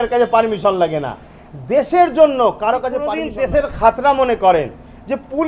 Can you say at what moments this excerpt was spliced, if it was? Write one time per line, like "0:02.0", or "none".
0:03.1